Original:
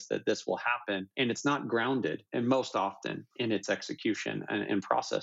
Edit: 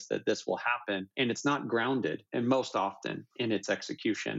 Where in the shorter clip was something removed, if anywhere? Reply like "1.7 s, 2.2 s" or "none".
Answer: none